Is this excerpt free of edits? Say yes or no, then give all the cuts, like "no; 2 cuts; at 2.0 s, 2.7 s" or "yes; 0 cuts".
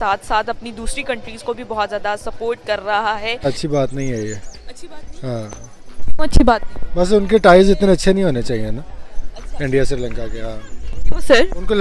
yes; 0 cuts